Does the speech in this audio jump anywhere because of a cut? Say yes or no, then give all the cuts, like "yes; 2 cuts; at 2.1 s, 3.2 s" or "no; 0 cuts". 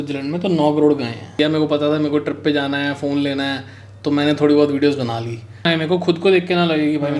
yes; 2 cuts; at 1.4 s, 5.7 s